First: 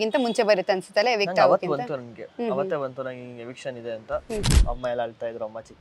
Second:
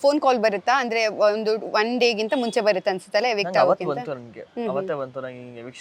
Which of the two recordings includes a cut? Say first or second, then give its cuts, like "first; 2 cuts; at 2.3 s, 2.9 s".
first; 1 cut; at 4.6 s